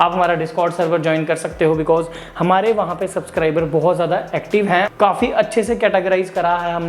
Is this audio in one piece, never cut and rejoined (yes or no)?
no